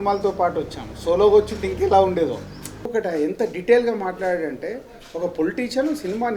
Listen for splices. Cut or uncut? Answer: cut